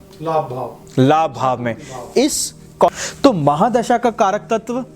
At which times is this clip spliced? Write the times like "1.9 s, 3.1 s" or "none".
2.9 s